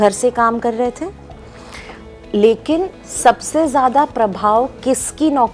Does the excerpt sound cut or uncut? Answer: uncut